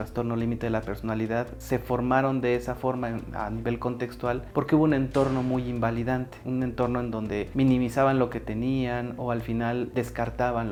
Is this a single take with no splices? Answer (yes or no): yes